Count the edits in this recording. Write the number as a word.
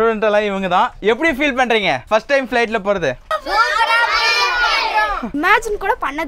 three